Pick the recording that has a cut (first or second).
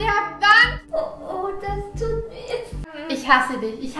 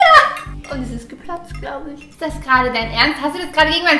first